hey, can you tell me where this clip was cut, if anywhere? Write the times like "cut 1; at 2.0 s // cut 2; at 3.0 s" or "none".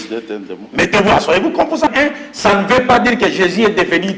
cut 1; at 1.9 s